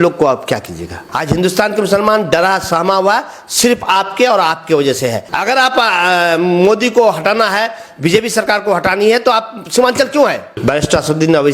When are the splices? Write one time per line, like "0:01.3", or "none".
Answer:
0:01.0
0:05.2
0:10.5